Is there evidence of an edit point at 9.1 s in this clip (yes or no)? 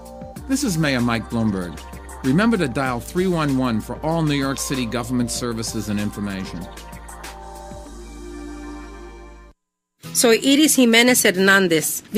yes